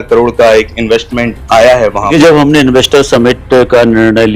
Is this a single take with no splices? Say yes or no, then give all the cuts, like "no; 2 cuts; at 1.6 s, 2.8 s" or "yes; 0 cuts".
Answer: no; 1 cut; at 2.0 s